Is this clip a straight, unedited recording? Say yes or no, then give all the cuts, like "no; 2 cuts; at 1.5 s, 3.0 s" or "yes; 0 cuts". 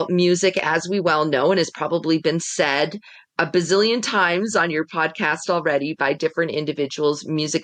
yes; 0 cuts